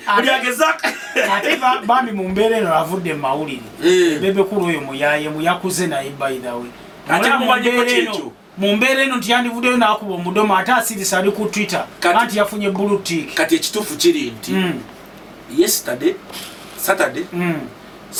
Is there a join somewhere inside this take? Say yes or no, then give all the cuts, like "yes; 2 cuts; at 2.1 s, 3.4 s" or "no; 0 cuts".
no; 0 cuts